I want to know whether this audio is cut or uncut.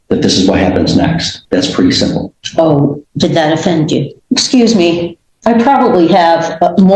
cut